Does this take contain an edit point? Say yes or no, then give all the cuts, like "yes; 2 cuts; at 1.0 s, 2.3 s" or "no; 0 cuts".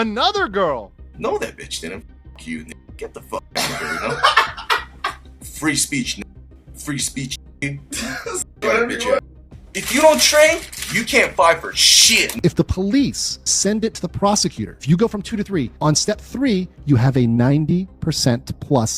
yes; 2 cuts; at 1.1 s, 12.3 s